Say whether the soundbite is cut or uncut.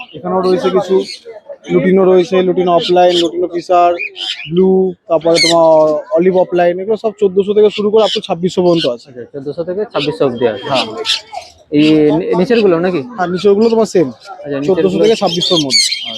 uncut